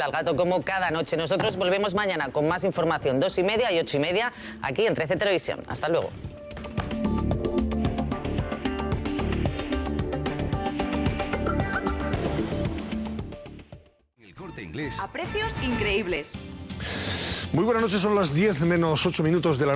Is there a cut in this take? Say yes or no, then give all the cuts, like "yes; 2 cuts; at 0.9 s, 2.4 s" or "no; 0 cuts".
no; 0 cuts